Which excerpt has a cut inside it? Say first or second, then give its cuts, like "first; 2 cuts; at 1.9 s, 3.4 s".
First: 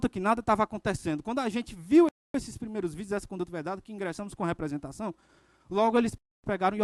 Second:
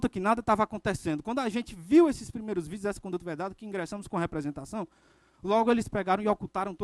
second; 2 cuts; at 2.1 s, 5.9 s